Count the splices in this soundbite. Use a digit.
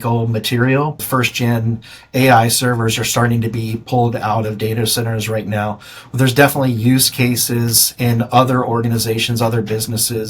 1